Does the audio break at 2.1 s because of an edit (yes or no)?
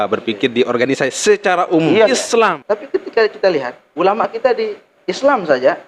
yes